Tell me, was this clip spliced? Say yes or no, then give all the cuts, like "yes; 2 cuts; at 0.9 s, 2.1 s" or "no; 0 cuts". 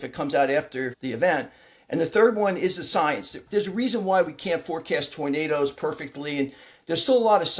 yes; 1 cut; at 3.4 s